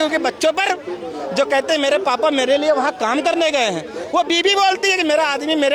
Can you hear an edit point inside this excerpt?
no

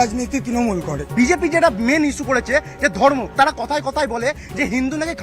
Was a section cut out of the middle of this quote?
yes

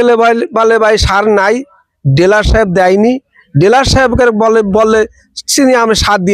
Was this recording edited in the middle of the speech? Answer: no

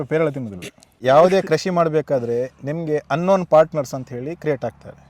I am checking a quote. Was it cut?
yes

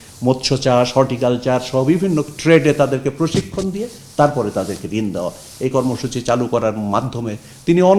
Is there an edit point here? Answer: no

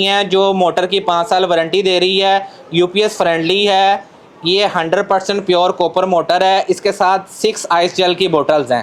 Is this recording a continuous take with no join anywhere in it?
yes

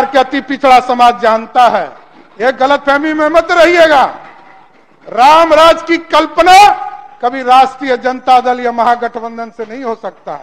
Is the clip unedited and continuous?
yes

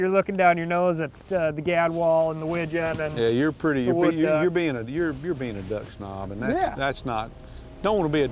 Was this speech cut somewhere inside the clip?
no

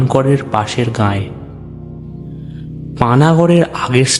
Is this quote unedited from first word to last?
no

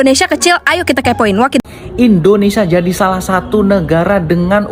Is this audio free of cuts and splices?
no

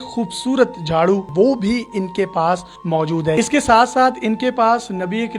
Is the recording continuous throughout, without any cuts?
no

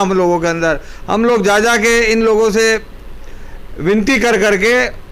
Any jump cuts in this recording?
no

